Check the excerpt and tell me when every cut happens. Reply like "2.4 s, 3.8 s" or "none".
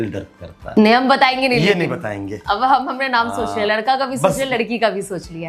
1.0 s